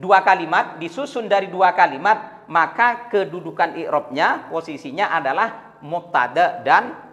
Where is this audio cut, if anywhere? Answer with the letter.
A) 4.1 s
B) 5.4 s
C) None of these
C